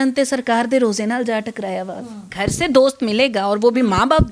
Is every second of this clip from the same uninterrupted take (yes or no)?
no